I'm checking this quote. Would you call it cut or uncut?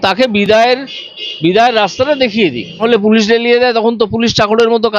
cut